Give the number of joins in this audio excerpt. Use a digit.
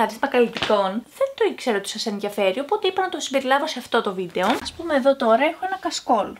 1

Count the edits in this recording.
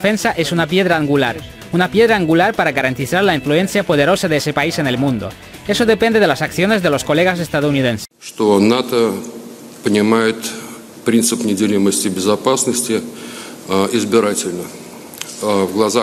1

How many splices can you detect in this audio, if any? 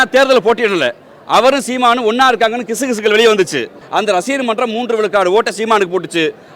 1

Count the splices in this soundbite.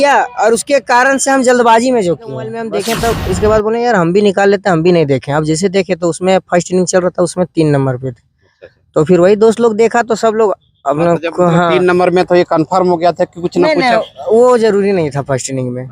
1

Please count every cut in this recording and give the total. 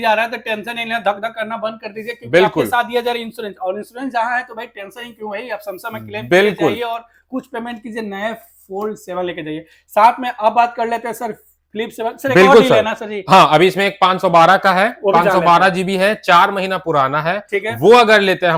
0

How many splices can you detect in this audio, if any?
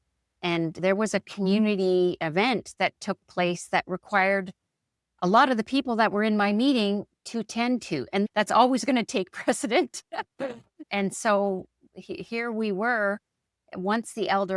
1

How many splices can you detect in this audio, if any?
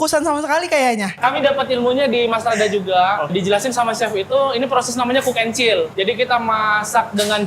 3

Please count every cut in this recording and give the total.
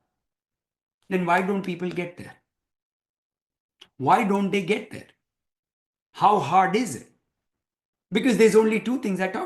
0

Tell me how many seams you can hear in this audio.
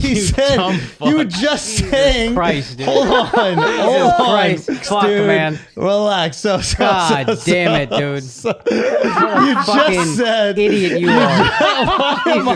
1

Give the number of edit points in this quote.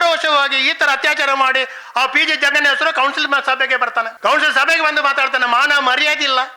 1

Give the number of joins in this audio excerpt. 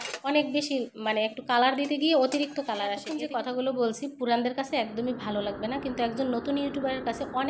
1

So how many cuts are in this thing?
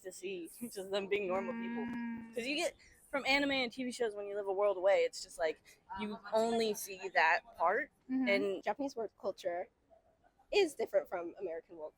1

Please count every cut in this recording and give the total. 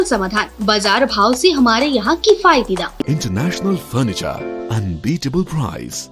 1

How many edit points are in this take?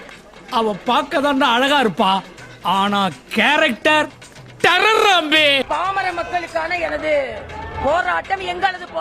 1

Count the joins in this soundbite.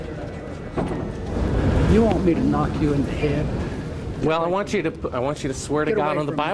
1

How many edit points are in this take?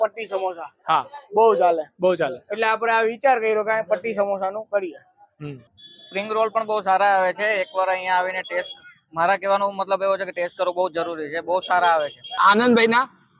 2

